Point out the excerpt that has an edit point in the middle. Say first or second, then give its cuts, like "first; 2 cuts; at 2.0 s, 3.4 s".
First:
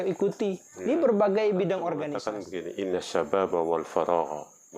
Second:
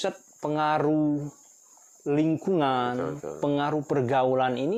first; 1 cut; at 2.1 s